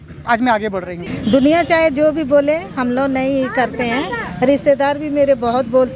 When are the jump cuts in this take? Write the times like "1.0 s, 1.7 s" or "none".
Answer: 1.0 s